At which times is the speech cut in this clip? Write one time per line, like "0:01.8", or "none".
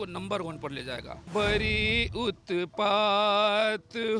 0:01.1